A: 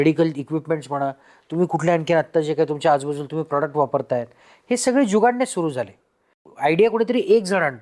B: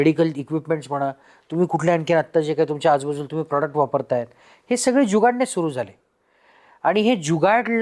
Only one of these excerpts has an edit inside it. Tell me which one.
A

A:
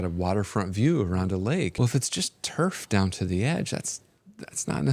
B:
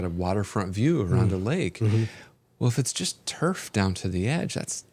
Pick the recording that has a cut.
A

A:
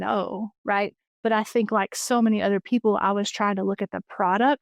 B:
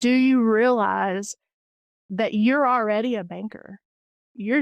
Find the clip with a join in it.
A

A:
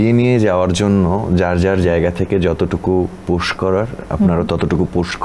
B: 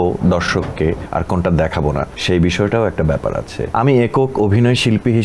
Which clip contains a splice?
B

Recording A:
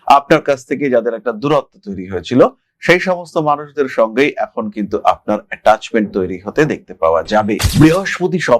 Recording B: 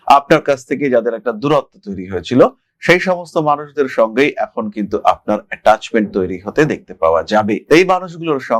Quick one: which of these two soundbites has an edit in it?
A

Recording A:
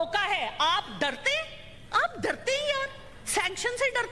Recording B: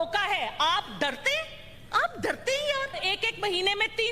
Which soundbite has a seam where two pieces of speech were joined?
B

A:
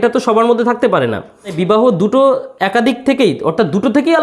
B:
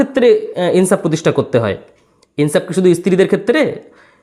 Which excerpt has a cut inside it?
A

